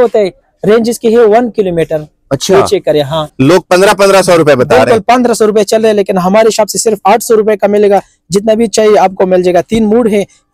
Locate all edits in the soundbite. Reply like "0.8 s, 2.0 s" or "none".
3.3 s